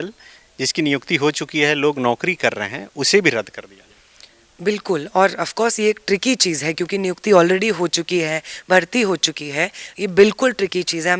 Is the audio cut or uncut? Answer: uncut